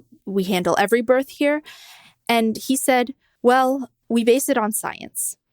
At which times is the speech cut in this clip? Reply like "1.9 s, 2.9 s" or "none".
3.2 s, 3.9 s